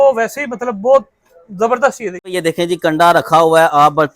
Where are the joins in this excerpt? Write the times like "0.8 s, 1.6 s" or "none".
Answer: 2.2 s